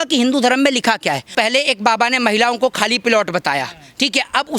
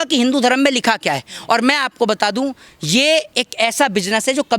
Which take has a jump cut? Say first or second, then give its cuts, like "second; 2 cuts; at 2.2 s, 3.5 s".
first; 1 cut; at 1.3 s